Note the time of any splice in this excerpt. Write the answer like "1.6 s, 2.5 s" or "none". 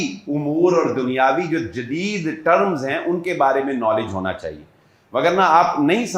none